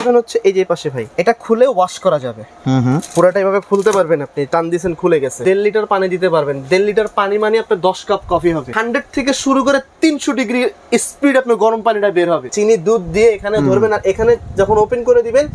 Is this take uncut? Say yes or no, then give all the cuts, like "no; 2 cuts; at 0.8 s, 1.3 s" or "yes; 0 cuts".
no; 4 cuts; at 1.1 s, 5.4 s, 8.8 s, 12.5 s